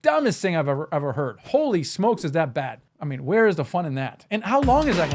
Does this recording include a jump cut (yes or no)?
no